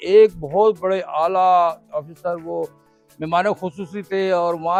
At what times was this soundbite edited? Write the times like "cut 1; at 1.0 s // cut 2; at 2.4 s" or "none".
none